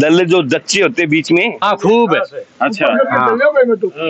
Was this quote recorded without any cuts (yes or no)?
no